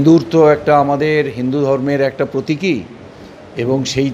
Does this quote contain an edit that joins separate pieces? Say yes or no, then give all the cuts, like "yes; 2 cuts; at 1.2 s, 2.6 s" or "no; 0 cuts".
no; 0 cuts